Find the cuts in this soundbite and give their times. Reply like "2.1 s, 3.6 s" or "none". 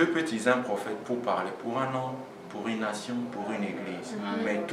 none